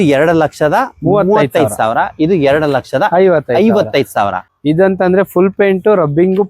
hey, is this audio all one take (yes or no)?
no